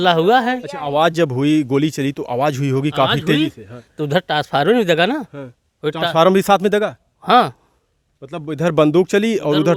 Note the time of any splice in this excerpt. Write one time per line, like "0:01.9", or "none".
none